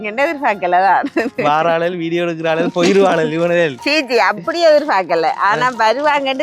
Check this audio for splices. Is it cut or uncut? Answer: uncut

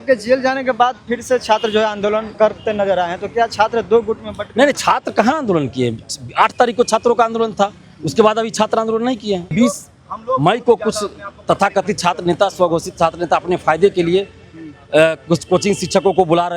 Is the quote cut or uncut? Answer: cut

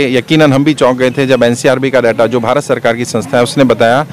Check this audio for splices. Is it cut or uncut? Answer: uncut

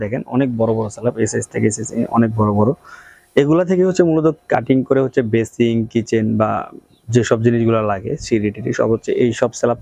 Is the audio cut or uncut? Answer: uncut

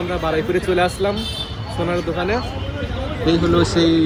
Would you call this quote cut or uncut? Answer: uncut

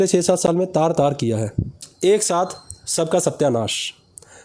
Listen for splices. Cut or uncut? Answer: cut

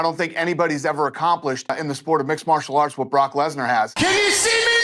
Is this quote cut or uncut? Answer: cut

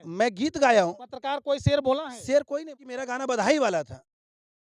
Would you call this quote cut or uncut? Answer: cut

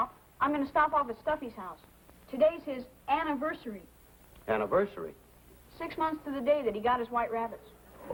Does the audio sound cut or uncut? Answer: uncut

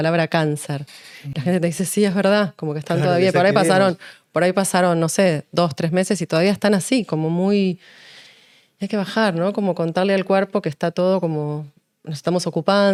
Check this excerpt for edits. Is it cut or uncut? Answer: uncut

